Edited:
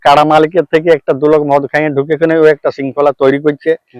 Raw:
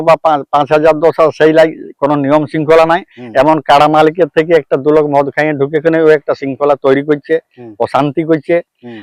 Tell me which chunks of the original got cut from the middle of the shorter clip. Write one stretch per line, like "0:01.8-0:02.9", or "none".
none